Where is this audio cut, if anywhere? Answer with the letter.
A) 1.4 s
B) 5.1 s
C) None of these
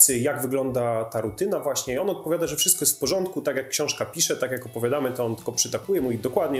C